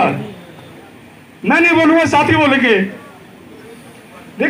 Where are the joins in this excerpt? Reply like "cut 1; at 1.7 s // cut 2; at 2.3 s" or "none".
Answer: none